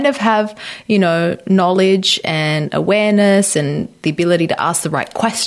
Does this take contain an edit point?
no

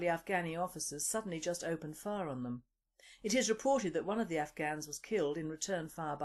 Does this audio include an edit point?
yes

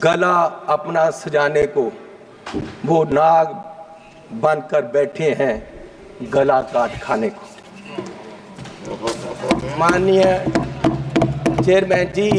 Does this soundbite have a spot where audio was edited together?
no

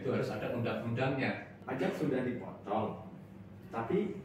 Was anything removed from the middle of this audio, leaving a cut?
yes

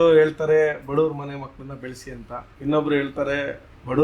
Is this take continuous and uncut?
no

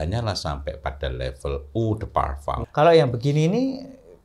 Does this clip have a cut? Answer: yes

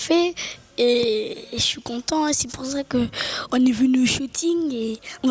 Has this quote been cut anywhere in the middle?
no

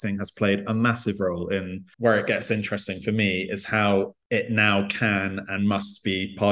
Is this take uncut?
no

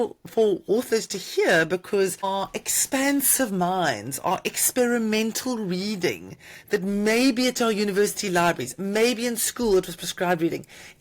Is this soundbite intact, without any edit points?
no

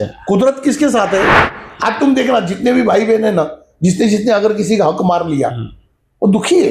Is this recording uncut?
no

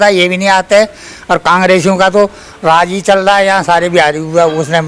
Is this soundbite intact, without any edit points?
yes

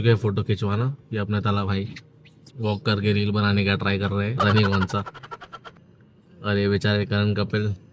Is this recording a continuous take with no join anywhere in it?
yes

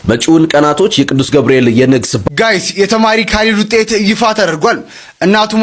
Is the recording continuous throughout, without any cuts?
no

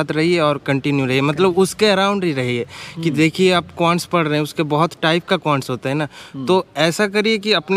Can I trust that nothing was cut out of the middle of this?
yes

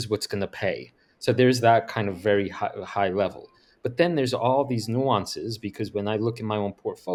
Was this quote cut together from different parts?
no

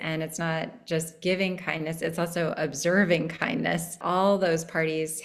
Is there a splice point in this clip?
yes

